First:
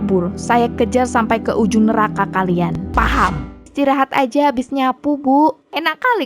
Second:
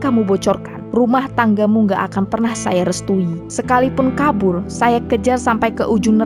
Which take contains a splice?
first; 1 cut; at 3.6 s

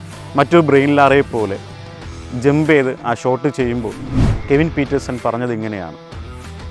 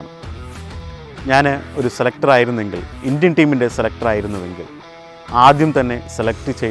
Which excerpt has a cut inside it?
first; 1 cut; at 4.3 s

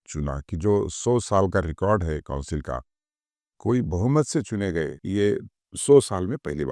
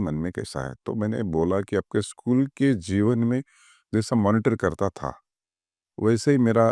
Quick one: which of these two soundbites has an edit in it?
first; 1 cut; at 5.0 s

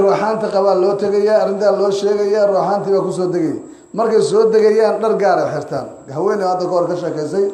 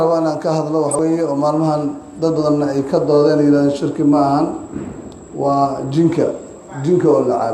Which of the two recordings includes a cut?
second; 1 cut; at 1.0 s

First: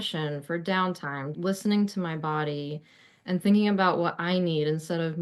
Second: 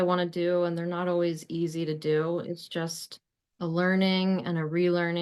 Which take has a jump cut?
first; 1 cut; at 1.3 s

